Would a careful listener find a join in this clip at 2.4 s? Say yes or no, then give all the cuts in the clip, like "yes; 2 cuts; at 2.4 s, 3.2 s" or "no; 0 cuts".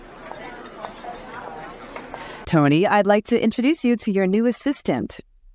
yes; 1 cut; at 2.4 s